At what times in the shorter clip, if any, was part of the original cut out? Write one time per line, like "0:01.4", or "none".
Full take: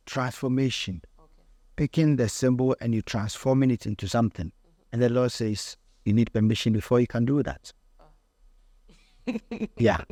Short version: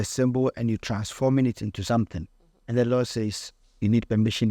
none